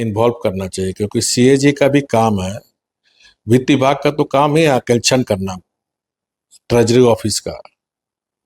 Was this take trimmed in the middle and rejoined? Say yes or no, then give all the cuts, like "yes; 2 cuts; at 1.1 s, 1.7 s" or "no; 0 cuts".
no; 0 cuts